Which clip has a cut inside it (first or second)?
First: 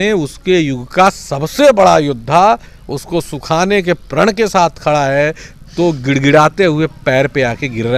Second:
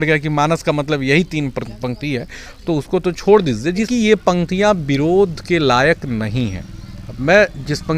second